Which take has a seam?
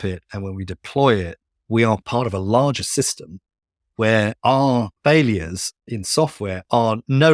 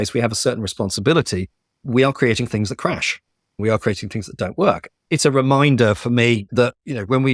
second; 1 cut; at 5.0 s

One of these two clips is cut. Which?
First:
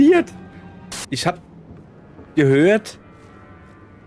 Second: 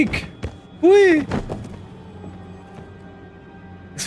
first; 1 cut; at 1.0 s

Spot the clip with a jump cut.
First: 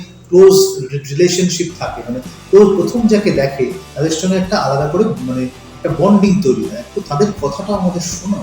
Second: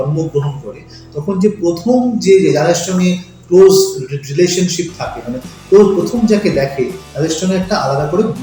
first; 1 cut; at 6.8 s

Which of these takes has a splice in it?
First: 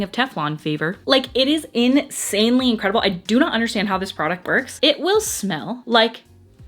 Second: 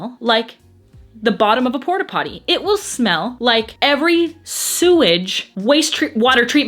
first; 2 cuts; at 1.0 s, 4.8 s

